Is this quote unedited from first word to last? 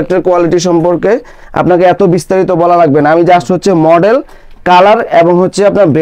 yes; 0 cuts

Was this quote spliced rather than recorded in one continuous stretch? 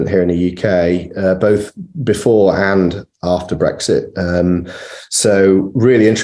no; 0 cuts

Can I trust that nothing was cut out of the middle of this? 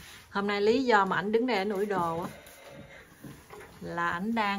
yes; 0 cuts

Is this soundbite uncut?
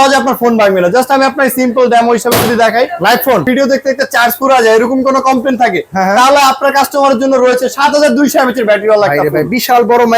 no; 1 cut; at 3.5 s

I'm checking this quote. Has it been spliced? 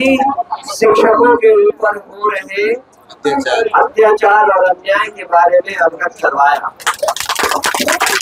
no; 0 cuts

